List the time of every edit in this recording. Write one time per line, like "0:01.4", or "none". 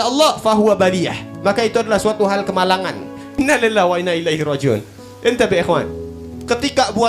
0:03.2